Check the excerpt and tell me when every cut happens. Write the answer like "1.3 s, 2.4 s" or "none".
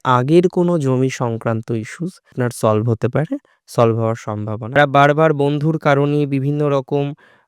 4.8 s